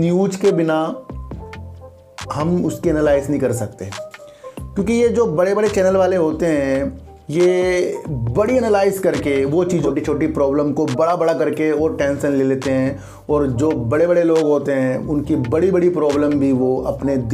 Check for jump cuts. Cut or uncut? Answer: cut